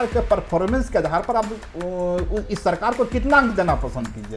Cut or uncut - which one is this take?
uncut